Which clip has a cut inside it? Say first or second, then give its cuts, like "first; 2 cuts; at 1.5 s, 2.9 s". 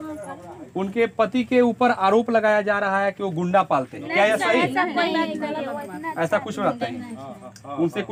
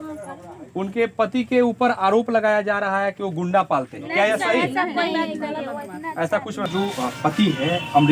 second; 1 cut; at 6.6 s